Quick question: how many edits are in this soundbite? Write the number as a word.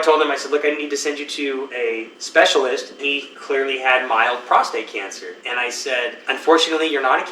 three